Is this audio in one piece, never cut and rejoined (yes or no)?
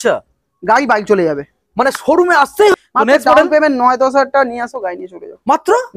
no